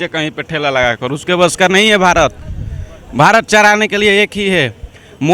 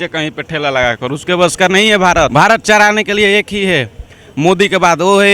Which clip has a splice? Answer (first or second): second